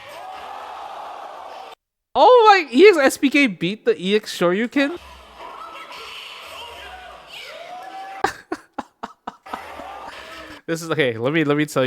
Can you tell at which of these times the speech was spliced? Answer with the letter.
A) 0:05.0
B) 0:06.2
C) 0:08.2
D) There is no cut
A